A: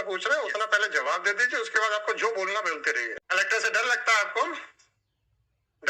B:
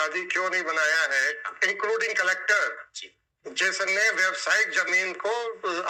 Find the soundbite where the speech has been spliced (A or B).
A